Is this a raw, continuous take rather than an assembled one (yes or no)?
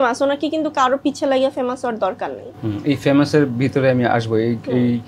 yes